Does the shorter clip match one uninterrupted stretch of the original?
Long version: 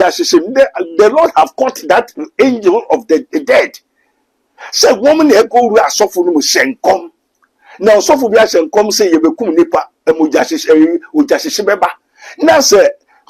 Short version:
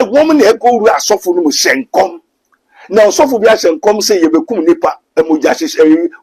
yes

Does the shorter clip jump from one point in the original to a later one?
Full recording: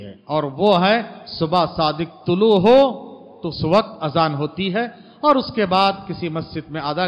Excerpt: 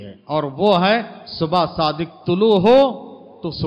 no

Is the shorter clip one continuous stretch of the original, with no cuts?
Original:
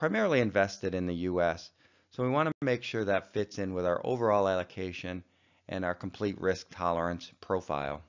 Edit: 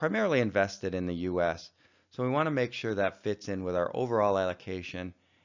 no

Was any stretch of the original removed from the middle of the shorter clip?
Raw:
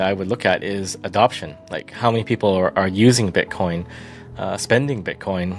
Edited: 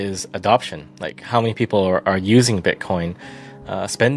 no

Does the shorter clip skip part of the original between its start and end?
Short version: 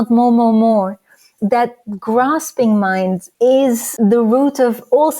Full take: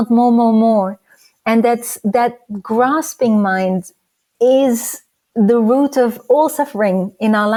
yes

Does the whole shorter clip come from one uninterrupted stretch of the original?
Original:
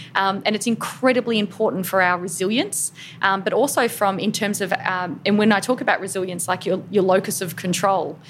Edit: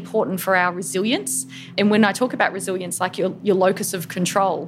no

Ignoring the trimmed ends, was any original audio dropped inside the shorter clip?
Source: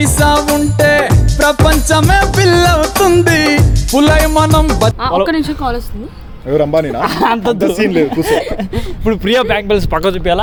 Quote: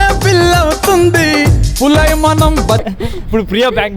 yes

